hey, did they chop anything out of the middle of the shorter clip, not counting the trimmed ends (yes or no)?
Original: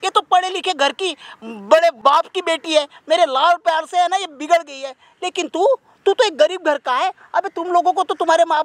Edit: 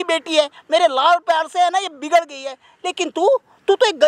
no